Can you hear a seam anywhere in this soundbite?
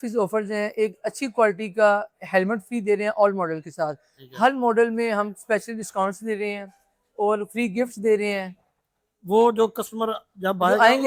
no; 0 cuts

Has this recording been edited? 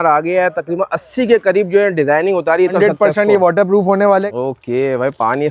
yes; 2 cuts; at 2.7 s, 4.3 s

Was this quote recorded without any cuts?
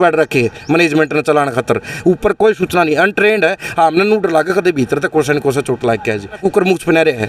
no; 1 cut; at 6.4 s

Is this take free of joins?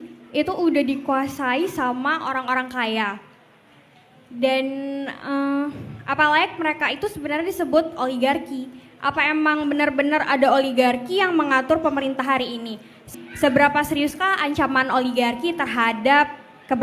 no; 1 cut; at 13.1 s

